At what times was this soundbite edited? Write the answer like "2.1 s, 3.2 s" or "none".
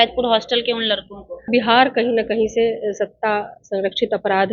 1.5 s